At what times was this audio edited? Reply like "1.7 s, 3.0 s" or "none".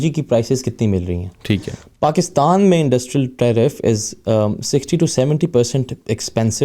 none